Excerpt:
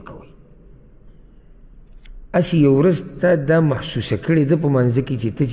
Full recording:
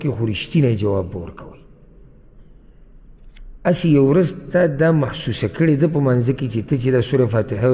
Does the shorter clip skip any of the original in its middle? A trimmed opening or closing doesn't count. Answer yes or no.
no